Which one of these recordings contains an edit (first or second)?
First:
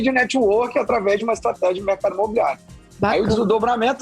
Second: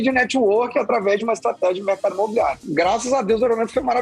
second